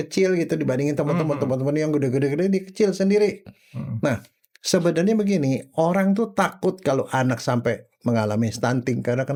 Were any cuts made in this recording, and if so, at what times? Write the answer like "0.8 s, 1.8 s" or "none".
none